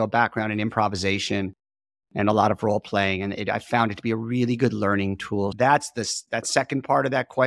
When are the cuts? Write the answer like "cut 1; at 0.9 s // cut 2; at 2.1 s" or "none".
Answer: none